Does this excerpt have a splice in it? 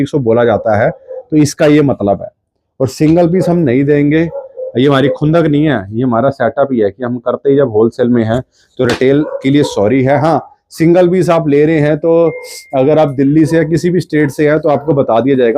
no; 0 cuts

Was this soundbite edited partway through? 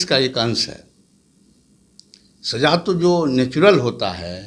no; 0 cuts

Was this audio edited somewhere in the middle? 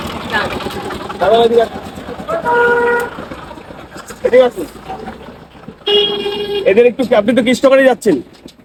no; 0 cuts

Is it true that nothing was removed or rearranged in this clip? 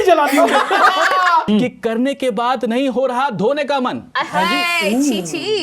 no; 1 cut; at 1.4 s

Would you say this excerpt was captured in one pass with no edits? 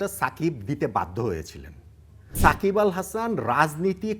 no; 1 cut; at 2.3 s

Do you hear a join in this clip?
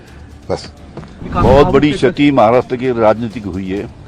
yes; 1 cut; at 1.2 s

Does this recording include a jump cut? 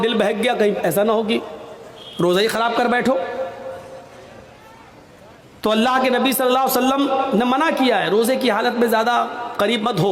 no; 0 cuts

